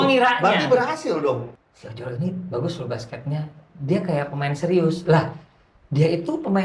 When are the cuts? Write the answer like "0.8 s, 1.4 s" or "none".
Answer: 1.5 s